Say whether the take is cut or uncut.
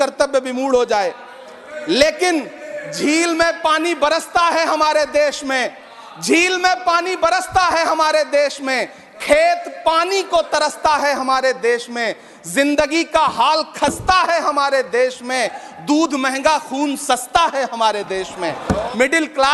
cut